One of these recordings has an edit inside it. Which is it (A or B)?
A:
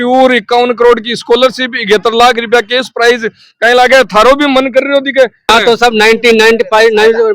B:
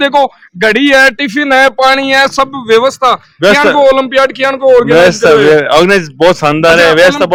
A